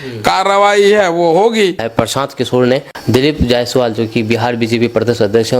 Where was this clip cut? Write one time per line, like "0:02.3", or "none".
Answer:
0:01.8
0:02.9

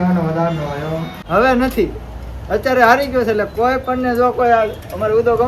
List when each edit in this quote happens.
0:01.1

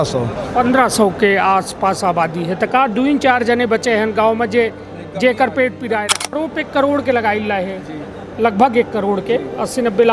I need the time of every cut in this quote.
0:06.4

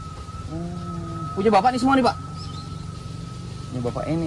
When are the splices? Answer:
none

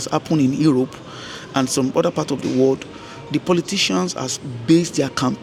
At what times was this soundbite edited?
none

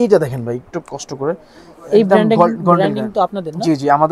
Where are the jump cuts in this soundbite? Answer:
none

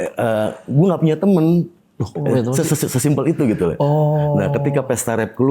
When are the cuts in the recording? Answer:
none

